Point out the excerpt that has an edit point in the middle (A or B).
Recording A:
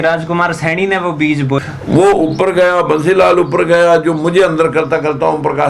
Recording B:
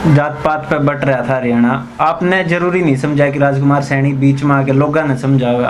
A